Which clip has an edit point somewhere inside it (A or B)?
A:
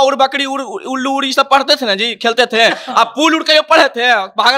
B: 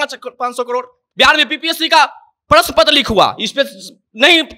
B